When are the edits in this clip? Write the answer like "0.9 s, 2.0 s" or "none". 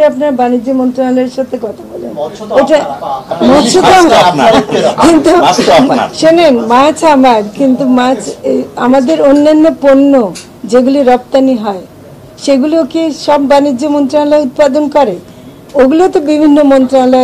none